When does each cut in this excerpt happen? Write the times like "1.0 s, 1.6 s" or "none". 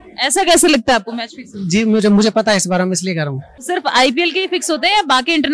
3.5 s